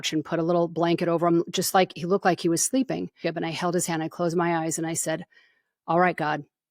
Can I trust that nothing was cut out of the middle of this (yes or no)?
no